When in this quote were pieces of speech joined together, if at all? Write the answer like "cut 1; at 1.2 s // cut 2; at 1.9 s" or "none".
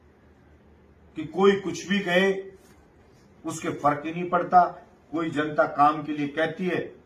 none